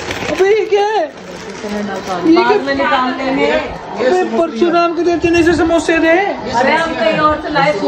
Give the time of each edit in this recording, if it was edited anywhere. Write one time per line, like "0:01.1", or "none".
none